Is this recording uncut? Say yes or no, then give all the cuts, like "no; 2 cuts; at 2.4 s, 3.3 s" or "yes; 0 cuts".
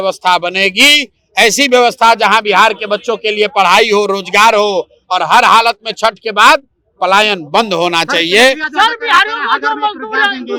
yes; 0 cuts